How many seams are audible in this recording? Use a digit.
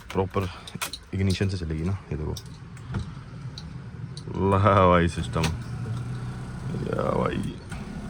0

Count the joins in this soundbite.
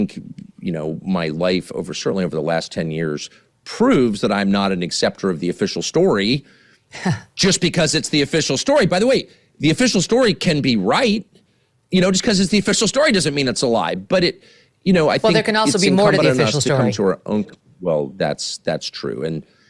0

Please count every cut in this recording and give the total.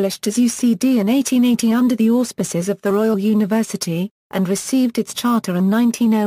0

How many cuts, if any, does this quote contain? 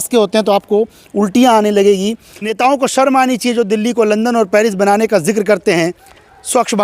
1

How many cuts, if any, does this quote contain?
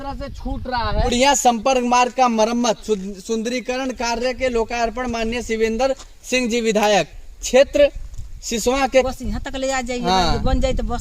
2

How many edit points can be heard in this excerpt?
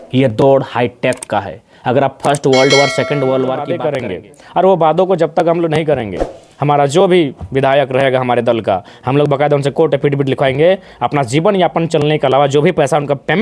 1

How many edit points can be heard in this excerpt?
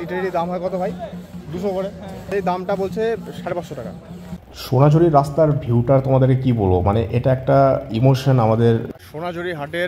3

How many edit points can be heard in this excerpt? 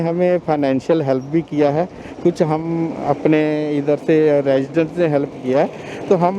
0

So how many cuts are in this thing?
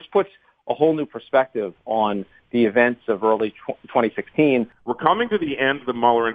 1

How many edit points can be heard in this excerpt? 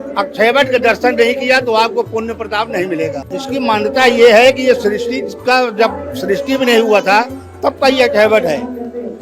1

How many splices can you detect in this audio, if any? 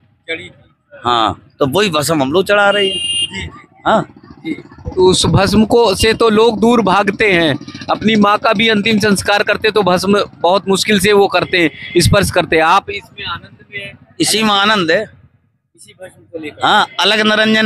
0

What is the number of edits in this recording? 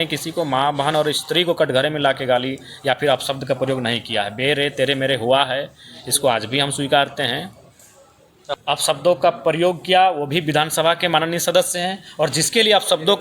1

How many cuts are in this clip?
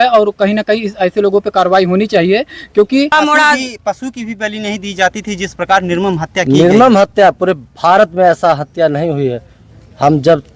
1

